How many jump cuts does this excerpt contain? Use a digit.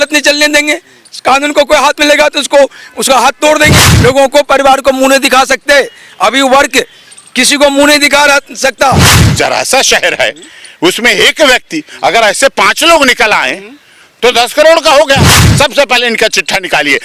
3